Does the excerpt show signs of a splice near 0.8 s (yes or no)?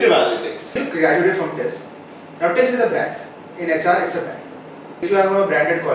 yes